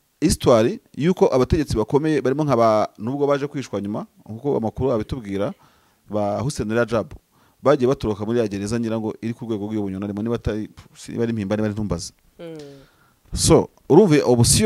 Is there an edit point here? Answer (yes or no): no